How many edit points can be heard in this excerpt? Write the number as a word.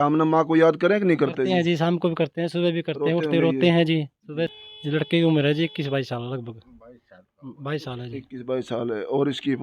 one